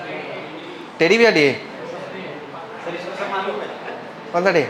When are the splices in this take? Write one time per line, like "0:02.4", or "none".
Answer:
none

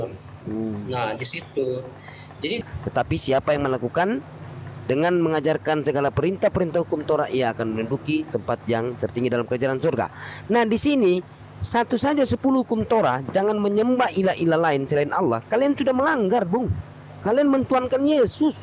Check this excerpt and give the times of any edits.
0:02.6

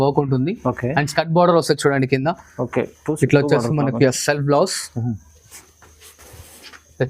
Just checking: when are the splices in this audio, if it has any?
none

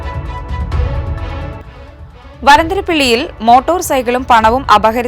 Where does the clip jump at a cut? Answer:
0:01.6

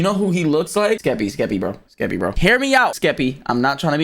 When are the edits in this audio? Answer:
0:01.0
0:02.3
0:03.0

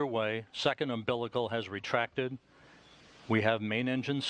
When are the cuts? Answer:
none

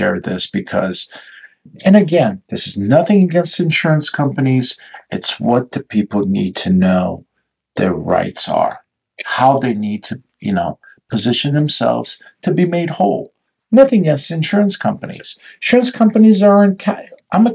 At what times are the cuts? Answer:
none

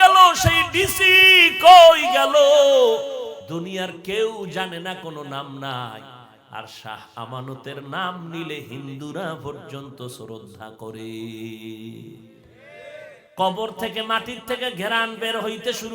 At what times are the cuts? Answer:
0:03.4
0:13.3

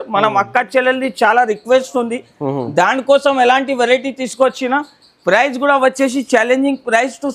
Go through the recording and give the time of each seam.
none

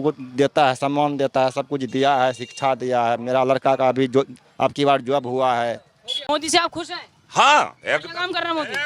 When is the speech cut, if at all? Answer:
0:06.3

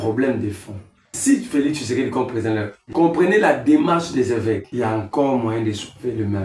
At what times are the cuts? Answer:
0:01.2
0:02.8
0:04.7

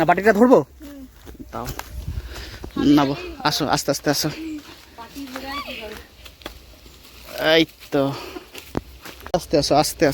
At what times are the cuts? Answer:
0:09.1

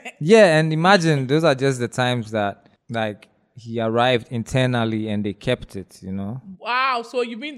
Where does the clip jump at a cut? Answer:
0:02.7
0:06.5

